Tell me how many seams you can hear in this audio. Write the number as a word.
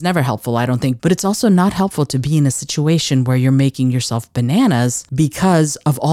one